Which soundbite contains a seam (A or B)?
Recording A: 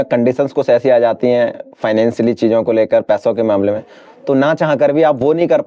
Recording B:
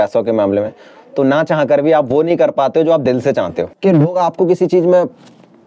B